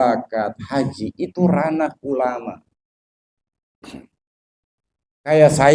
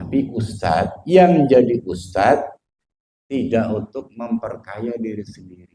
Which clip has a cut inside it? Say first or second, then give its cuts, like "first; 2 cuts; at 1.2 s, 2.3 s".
first; 1 cut; at 3.6 s